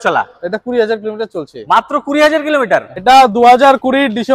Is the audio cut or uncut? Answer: cut